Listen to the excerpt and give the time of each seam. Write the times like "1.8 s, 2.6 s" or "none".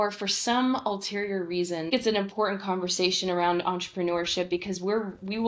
1.9 s